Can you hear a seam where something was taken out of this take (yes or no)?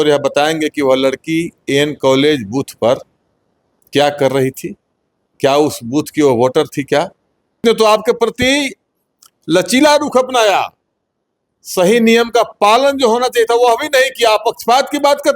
yes